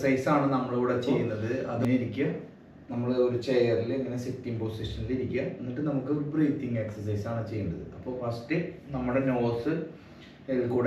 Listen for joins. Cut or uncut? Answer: cut